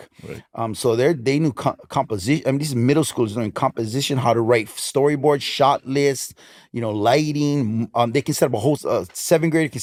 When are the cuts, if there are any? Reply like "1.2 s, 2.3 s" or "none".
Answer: none